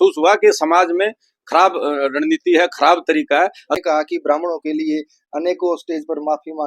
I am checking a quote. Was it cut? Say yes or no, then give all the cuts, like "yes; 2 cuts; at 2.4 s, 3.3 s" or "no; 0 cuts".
yes; 1 cut; at 3.7 s